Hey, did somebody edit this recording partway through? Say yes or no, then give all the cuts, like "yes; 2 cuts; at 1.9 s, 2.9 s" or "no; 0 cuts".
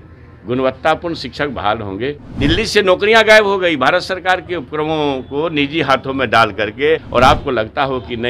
yes; 2 cuts; at 2.3 s, 7.1 s